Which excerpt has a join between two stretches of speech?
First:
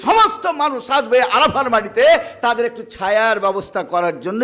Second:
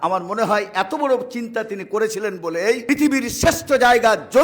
second; 1 cut; at 2.8 s

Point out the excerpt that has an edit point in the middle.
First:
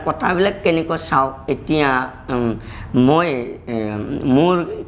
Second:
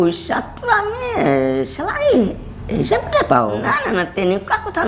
second; 1 cut; at 3.6 s

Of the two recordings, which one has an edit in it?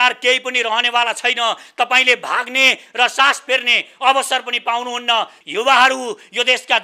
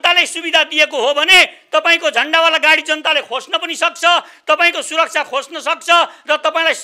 first; 1 cut; at 5.3 s

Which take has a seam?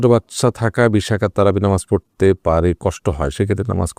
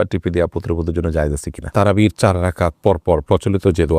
second; 1 cut; at 1.6 s

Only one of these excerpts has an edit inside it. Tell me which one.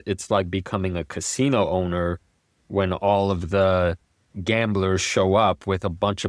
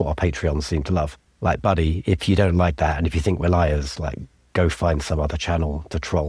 second; 1 cut; at 1.2 s

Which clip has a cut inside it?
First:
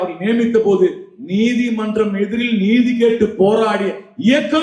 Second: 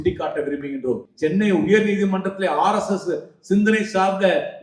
second; 1 cut; at 1.1 s

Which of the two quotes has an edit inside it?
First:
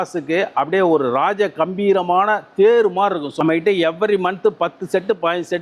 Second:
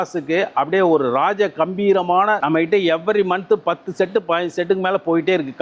second; 1 cut; at 2.4 s

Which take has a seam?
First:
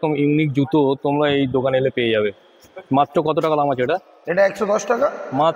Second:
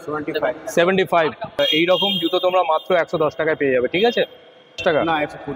second; 2 cuts; at 1.6 s, 4.8 s

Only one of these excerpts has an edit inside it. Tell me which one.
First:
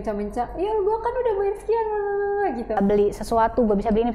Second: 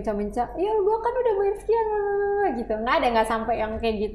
first; 1 cut; at 2.8 s

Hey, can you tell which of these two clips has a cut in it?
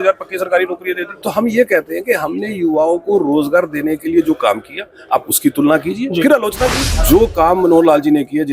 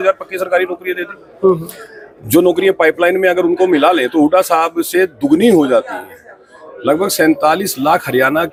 first; 2 cuts; at 1.2 s, 6.9 s

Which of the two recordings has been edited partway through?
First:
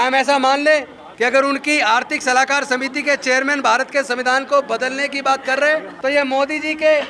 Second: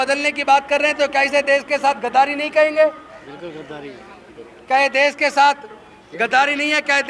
first; 2 cuts; at 1.0 s, 5.9 s

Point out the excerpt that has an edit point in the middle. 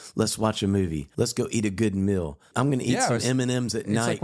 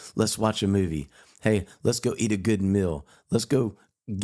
first; 2 cuts; at 1.1 s, 2.4 s

